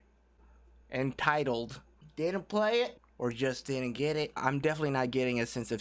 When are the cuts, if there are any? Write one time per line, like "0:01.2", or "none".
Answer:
0:04.3

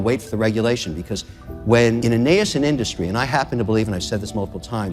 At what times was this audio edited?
0:02.0

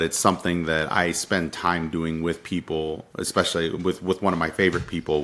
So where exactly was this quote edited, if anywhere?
0:03.1

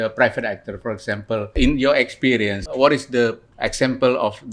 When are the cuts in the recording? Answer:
0:01.5
0:02.6
0:03.5

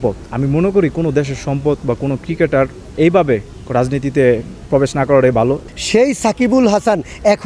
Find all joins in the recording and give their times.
0:02.9
0:04.5
0:05.6

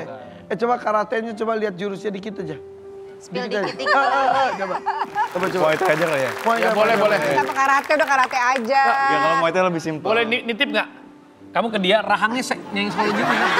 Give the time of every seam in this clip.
none

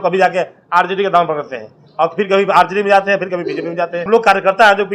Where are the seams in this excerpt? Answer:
0:04.0

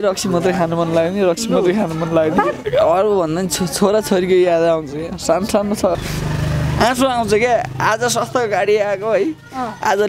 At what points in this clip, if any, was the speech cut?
0:02.6
0:06.0

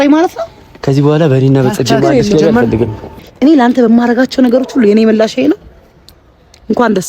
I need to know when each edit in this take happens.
0:03.0

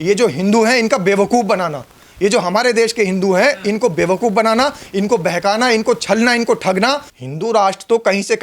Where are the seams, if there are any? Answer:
0:07.1

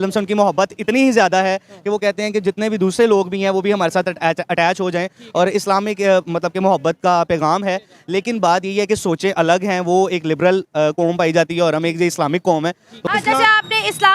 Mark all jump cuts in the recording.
0:13.0

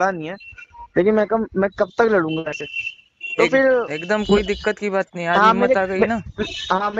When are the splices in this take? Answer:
none

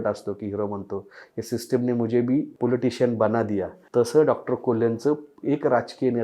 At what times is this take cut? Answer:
0:02.5
0:03.8
0:05.3

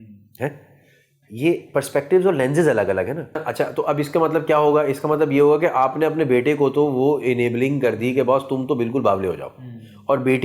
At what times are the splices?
0:03.5

